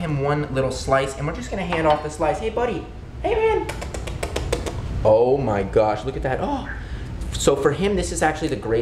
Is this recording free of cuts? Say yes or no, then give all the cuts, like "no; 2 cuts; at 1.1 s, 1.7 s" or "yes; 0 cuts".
yes; 0 cuts